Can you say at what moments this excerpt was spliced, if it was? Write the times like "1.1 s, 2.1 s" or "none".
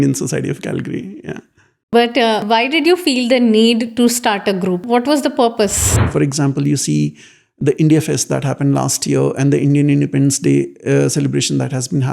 2.4 s, 4.8 s, 6.0 s